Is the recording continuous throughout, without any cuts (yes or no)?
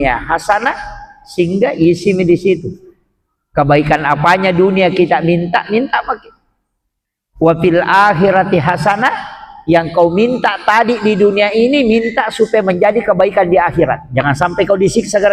yes